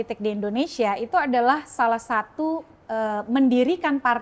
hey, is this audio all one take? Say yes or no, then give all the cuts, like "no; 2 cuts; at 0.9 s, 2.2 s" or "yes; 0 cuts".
yes; 0 cuts